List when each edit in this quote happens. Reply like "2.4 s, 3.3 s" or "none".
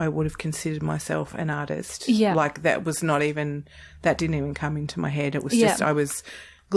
none